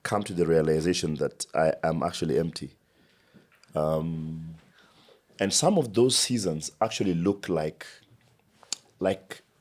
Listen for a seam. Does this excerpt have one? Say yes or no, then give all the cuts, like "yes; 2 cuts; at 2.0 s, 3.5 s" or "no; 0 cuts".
no; 0 cuts